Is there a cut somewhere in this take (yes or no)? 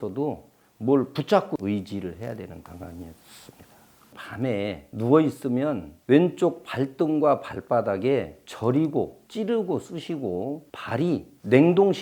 yes